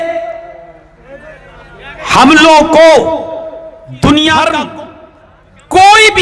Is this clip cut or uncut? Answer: cut